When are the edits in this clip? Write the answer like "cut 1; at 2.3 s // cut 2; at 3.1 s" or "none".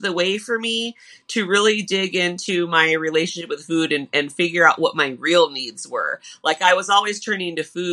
none